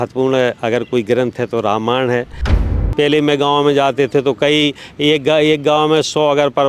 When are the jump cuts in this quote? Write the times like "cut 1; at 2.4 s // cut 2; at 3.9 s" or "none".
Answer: cut 1; at 2.7 s